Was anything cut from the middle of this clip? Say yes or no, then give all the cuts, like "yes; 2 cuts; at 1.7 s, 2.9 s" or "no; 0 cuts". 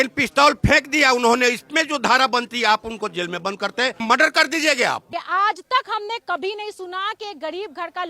yes; 2 cuts; at 4.0 s, 5.1 s